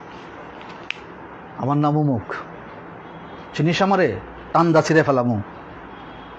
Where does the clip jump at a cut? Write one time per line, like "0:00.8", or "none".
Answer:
0:01.2